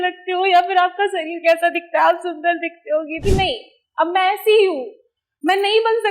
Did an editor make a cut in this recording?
yes; 1 cut; at 3.2 s

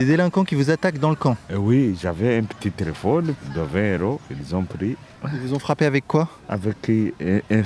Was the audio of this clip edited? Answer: yes; 4 cuts; at 1.5 s, 3.5 s, 5.1 s, 6.4 s

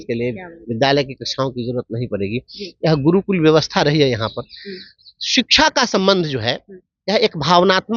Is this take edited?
no; 0 cuts

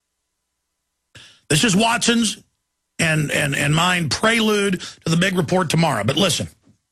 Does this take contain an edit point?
yes; 1 cut; at 4.9 s

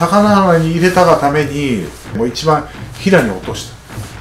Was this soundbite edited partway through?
yes; 1 cut; at 2.2 s

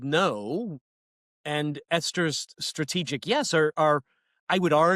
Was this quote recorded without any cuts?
yes; 0 cuts

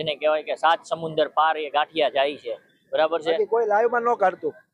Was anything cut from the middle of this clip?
yes; 1 cut; at 3.4 s

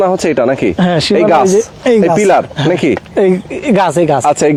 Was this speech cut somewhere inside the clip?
no; 0 cuts

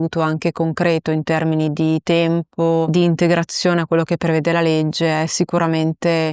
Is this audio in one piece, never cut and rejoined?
yes; 0 cuts

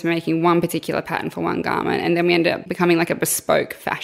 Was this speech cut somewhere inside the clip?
yes; 1 cut; at 2.7 s

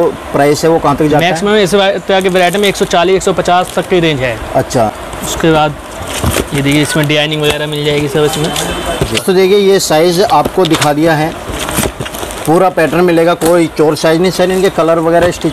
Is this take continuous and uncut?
yes; 0 cuts

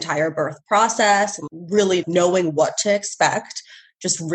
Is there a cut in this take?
no; 0 cuts

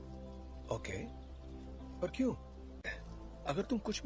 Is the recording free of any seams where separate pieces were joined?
yes; 0 cuts

